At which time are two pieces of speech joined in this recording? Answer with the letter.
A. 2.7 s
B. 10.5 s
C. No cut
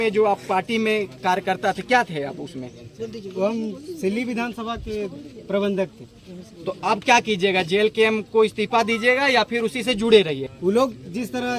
B